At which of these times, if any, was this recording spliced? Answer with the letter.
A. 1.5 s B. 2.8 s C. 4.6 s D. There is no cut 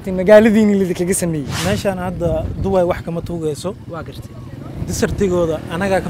A